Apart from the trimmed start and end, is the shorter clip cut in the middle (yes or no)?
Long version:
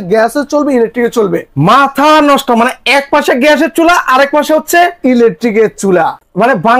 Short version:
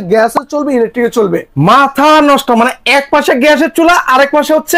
no